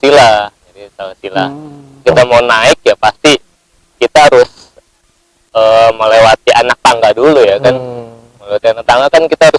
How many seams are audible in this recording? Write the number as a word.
one